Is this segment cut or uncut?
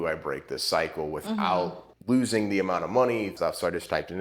cut